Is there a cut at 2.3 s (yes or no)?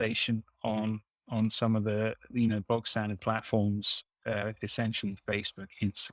no